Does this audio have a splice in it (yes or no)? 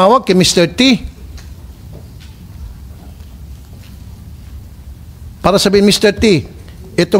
no